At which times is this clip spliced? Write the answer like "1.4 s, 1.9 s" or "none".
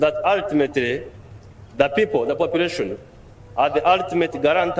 none